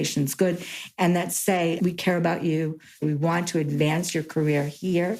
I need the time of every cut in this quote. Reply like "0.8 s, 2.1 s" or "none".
1.8 s, 3.0 s